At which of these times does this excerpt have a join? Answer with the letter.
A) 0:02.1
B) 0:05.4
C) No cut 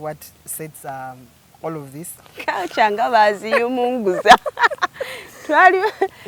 A